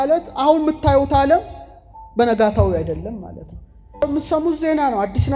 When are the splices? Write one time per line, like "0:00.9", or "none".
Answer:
0:04.0